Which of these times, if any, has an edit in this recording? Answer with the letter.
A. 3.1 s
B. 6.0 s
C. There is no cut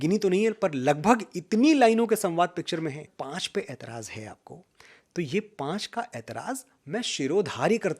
A